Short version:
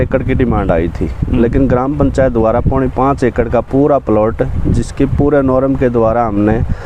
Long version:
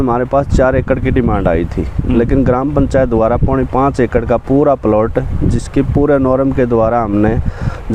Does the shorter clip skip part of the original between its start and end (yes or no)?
no